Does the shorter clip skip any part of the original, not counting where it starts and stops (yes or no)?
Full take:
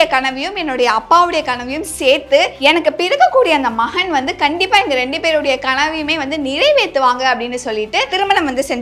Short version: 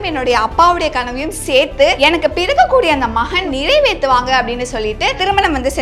yes